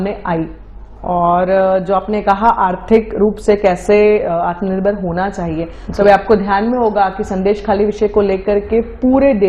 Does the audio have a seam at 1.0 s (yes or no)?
no